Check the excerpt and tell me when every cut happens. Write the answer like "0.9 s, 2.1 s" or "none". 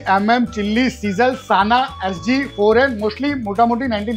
none